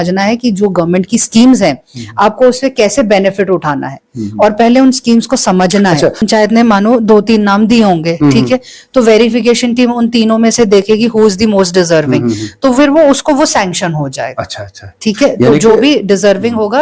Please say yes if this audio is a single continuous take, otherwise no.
yes